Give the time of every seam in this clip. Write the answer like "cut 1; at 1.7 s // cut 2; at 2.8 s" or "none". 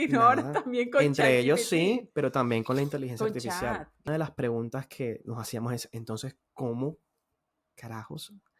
cut 1; at 4.1 s